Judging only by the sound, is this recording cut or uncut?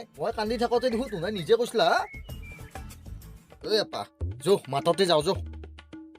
cut